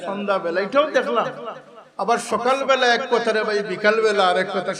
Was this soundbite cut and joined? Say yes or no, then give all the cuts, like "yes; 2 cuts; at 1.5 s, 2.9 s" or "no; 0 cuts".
no; 0 cuts